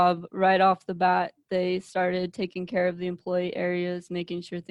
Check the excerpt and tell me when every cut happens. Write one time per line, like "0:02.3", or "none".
none